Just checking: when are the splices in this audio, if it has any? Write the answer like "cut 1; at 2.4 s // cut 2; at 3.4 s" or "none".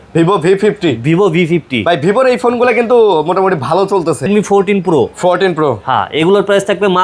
cut 1; at 4.3 s